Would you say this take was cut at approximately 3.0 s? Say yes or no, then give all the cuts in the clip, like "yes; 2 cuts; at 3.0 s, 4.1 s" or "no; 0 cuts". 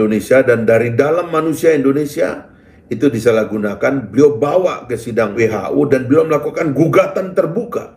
no; 1 cut; at 5.4 s